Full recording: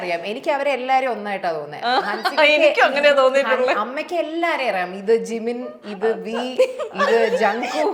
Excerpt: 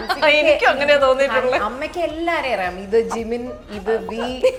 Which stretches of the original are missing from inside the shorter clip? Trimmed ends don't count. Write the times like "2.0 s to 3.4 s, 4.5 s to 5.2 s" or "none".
none